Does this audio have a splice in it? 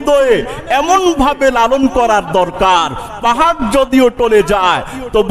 no; 0 cuts

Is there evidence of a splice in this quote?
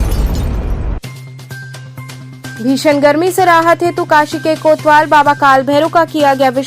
yes; 1 cut; at 1.8 s

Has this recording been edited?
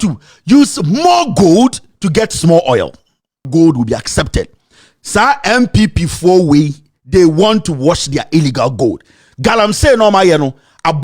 yes; 1 cut; at 3.5 s

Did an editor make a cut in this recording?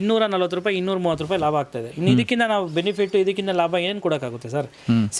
no; 0 cuts

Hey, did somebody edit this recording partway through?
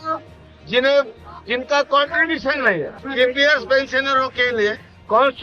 yes; 1 cut; at 3.0 s

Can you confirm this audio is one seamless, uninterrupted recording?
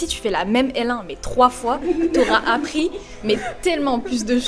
yes; 0 cuts

